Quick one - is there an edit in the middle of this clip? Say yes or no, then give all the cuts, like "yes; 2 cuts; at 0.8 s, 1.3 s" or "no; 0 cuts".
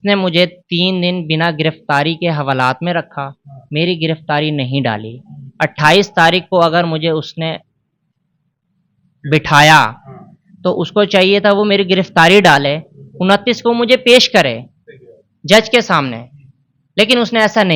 no; 0 cuts